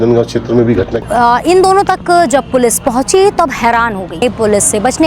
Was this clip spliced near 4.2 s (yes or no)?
yes